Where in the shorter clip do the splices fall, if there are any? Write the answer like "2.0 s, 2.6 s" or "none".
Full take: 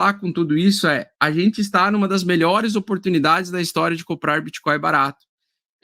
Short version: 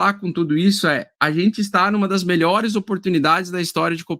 none

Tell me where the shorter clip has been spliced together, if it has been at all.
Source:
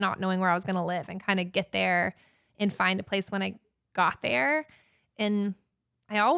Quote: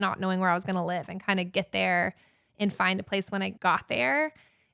3.5 s

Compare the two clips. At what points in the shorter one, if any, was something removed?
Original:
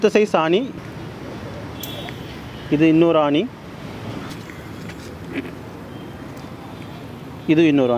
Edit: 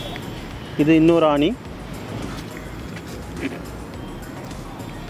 none

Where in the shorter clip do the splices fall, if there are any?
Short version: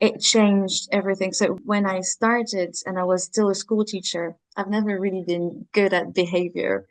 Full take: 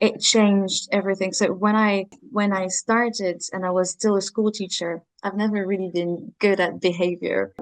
1.6 s

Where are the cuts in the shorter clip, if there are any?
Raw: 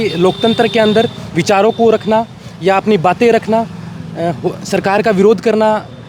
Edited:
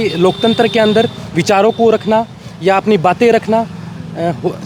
none

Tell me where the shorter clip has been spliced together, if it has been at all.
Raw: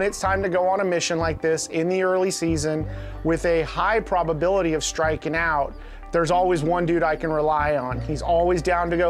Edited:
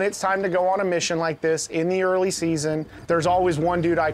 2.9 s

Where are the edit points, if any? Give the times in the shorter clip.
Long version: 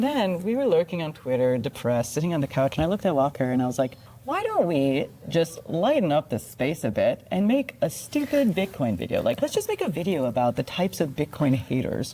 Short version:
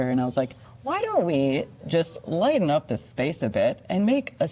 none

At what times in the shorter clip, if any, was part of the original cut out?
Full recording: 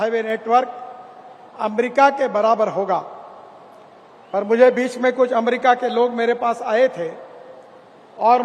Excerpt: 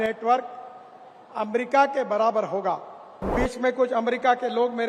3.4 s

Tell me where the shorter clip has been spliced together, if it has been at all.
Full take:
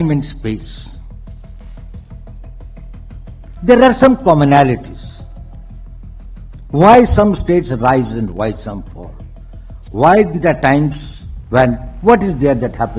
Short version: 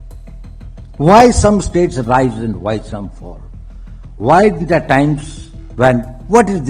1.0 s

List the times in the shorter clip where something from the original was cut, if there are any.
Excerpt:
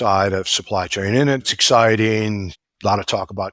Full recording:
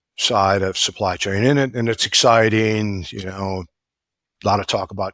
1.5 s, 2.6 s

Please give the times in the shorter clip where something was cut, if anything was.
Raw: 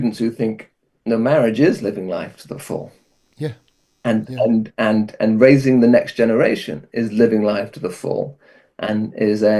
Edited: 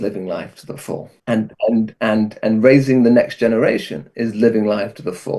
1.1 s

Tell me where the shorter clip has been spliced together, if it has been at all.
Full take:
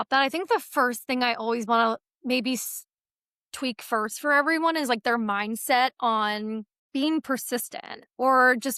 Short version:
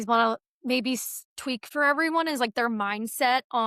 1.7 s

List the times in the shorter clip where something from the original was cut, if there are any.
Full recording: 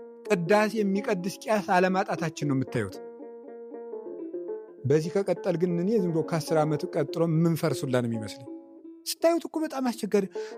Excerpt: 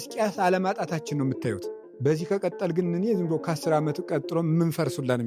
1.6 s

